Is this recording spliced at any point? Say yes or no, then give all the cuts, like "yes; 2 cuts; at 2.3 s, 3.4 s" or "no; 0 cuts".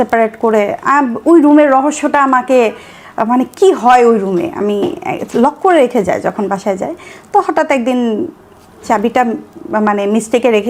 no; 0 cuts